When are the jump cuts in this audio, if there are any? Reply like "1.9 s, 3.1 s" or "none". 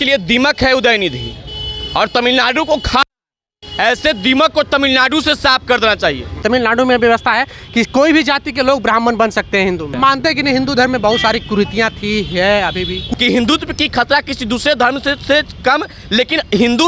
6.4 s, 9.9 s, 13.0 s